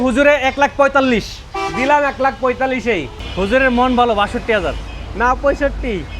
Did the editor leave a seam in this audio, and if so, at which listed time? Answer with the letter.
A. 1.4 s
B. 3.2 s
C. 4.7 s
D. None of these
B